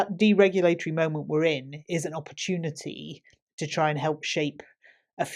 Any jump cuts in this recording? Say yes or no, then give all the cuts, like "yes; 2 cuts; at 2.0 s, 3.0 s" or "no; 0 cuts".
no; 0 cuts